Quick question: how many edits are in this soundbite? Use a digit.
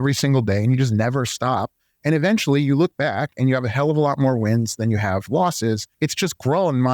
1